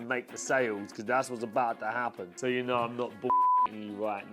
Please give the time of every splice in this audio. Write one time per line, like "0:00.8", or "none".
0:02.3